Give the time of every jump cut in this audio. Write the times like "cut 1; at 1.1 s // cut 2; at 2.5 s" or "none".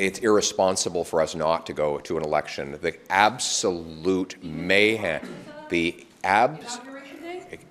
none